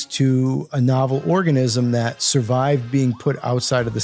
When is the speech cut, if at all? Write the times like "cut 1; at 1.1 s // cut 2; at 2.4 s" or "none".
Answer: none